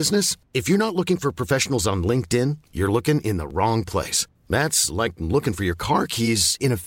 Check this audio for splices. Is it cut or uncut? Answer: uncut